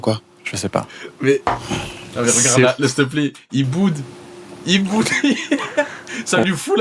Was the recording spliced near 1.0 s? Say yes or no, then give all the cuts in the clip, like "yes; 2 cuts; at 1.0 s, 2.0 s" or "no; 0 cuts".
no; 0 cuts